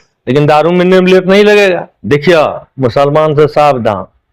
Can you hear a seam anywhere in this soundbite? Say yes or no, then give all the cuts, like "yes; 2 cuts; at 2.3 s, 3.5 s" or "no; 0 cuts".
yes; 1 cut; at 1.9 s